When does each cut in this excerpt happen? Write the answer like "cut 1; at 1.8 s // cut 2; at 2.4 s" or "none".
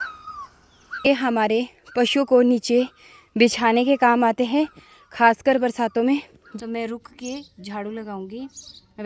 cut 1; at 1.0 s // cut 2; at 6.4 s

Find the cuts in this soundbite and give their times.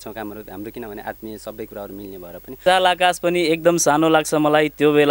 cut 1; at 2.6 s

